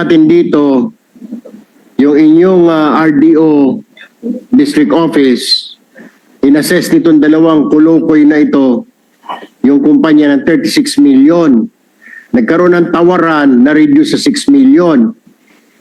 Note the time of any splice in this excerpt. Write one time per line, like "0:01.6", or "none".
none